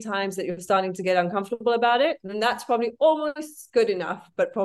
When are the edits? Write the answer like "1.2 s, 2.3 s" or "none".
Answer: none

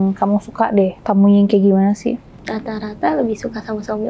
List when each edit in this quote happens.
1.0 s, 2.3 s

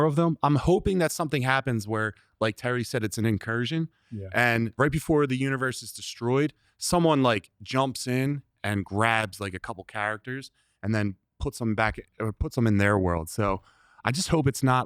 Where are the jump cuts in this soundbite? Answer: 4.8 s

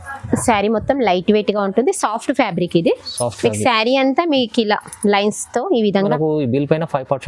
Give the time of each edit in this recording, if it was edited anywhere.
6.0 s

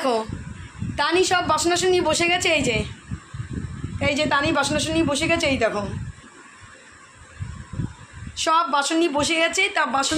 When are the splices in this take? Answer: none

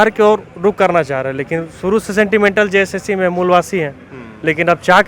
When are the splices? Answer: none

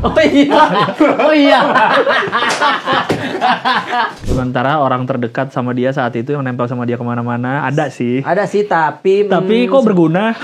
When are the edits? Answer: 4.2 s

